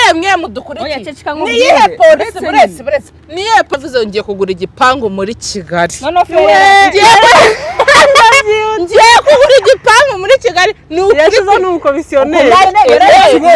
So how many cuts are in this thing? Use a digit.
1